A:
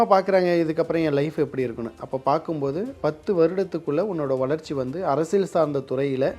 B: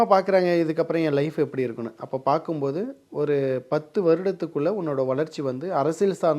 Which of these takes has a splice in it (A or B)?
A